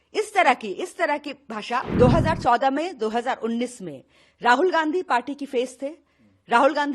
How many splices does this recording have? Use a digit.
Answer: 1